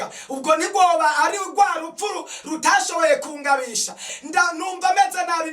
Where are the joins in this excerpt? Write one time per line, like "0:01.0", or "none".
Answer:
0:04.1